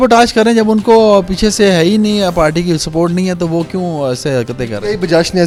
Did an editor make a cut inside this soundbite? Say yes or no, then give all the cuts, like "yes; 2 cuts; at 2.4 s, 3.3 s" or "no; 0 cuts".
no; 0 cuts